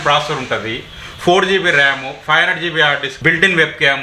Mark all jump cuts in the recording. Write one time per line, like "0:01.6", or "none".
0:03.1